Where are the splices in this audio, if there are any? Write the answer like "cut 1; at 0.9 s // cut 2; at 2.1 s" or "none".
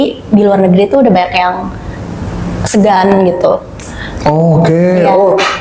none